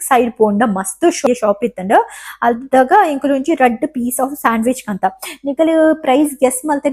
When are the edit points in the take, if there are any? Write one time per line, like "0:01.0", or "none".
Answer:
0:01.3